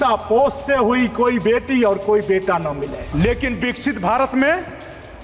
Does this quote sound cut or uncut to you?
cut